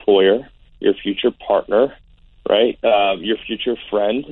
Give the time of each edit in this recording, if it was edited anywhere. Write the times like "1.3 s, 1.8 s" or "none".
none